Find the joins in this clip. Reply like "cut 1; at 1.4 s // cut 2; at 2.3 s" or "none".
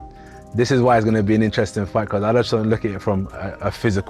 none